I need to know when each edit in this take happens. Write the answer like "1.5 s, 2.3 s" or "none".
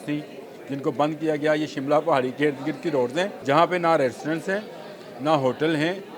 3.4 s